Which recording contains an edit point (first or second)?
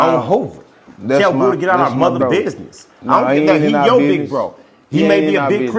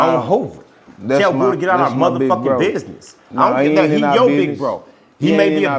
first